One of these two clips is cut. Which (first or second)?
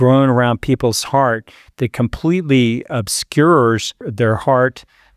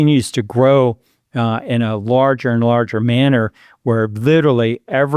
first